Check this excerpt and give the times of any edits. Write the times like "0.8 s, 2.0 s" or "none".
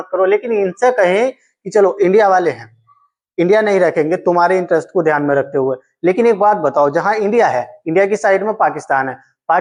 none